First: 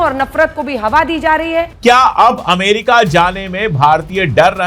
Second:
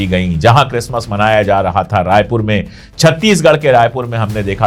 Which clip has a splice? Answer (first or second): first